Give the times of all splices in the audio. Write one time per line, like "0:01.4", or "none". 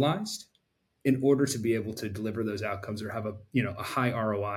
none

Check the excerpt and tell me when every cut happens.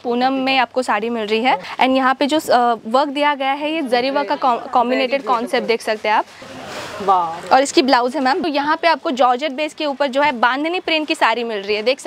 0:01.7
0:06.4
0:08.4

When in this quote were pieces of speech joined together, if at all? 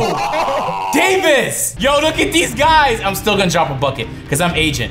0:01.6

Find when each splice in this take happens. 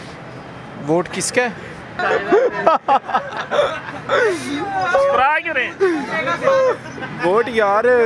0:02.0

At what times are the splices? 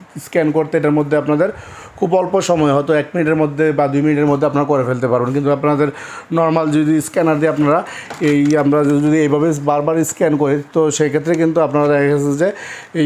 none

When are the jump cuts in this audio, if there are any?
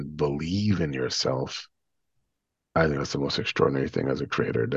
none

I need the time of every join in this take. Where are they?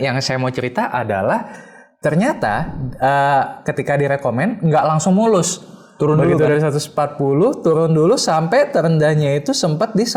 none

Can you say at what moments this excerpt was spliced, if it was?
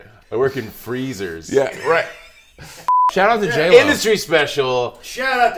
0:03.1

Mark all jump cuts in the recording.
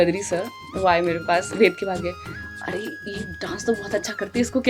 none

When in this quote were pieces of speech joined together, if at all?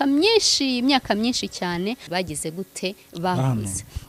0:02.0

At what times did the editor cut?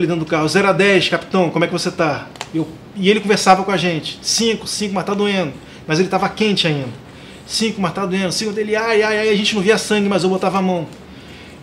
none

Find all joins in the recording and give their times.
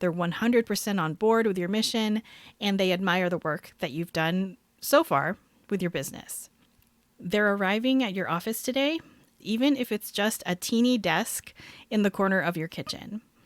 0:09.4

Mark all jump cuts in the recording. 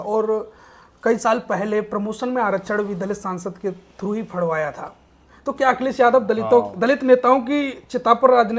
none

